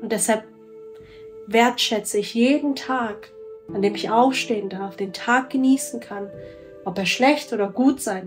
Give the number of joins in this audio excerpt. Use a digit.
0